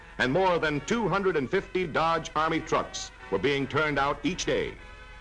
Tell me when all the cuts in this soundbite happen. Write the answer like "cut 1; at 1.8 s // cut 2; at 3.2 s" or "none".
none